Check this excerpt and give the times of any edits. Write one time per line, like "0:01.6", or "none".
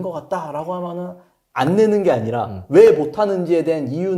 none